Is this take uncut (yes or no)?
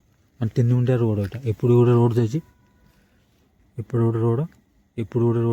yes